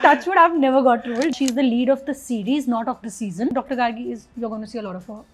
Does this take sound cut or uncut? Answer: cut